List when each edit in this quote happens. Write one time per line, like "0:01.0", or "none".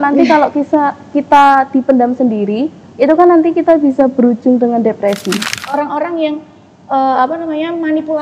0:05.5